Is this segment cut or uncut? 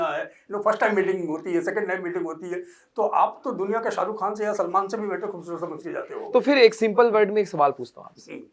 uncut